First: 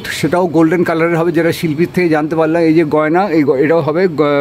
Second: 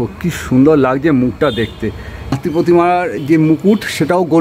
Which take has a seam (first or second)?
second